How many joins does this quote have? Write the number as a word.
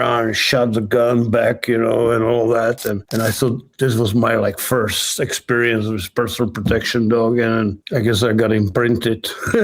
two